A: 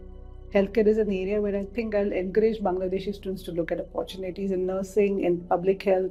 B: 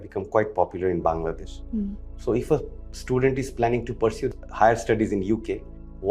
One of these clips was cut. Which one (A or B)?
B